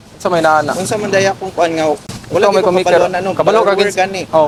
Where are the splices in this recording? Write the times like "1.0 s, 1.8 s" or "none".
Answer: none